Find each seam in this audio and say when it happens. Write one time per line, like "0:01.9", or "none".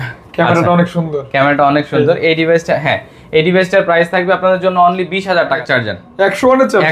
0:05.6